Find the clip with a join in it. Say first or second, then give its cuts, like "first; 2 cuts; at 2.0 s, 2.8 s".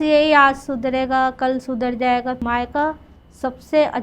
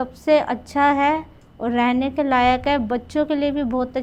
first; 1 cut; at 2.4 s